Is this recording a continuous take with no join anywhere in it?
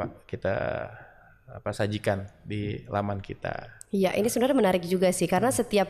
yes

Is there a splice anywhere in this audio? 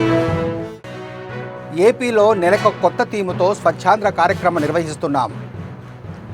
yes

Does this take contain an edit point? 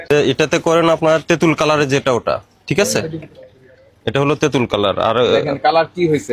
no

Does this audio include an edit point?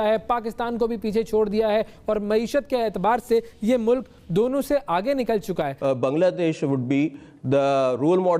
yes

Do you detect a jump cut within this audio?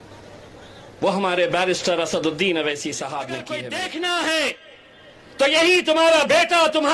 yes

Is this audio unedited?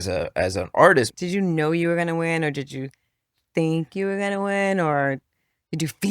no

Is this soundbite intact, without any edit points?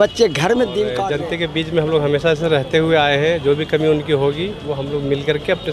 no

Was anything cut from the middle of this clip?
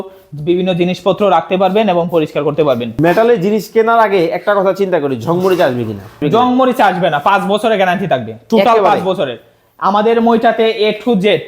yes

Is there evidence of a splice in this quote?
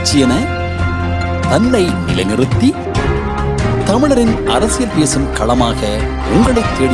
no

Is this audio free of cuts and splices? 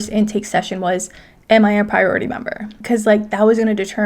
no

